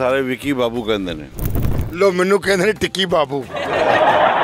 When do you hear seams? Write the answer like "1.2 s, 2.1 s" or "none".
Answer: none